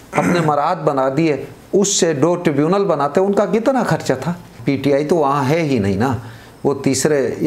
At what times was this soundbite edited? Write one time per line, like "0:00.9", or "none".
0:04.6